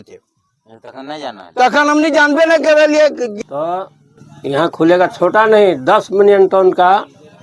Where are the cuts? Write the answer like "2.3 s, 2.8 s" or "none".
3.3 s